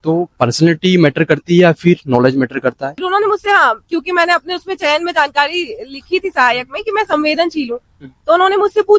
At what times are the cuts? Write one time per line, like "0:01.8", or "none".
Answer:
0:03.0

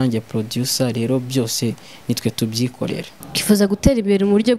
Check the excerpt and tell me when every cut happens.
0:03.1

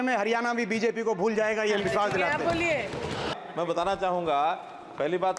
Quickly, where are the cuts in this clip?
0:03.3

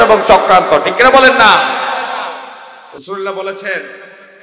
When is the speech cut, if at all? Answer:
none

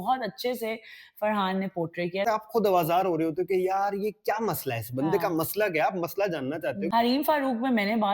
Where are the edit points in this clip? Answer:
0:02.2
0:06.9

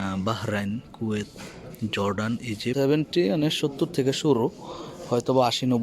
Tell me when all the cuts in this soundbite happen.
0:02.7

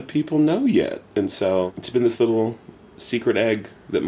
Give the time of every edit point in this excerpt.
0:01.8

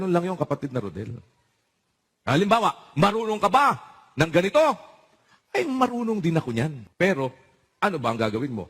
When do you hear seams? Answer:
0:06.8

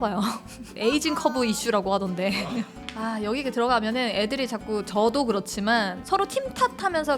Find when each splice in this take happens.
0:02.8

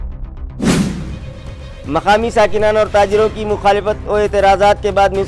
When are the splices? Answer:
0:01.1

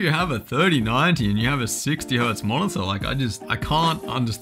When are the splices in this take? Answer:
0:03.5

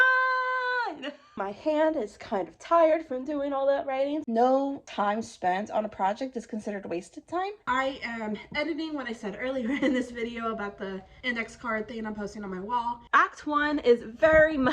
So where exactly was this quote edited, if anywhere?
0:01.2
0:04.2
0:07.6
0:13.0

